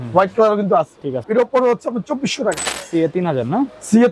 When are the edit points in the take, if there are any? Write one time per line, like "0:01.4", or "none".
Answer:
0:01.2
0:02.7